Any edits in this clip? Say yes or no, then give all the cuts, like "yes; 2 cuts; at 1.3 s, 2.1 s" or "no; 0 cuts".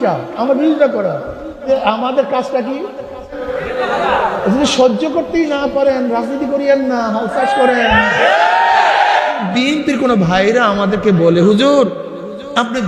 yes; 3 cuts; at 1.6 s, 3.4 s, 9.4 s